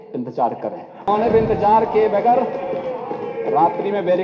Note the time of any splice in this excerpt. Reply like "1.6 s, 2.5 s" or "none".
1.1 s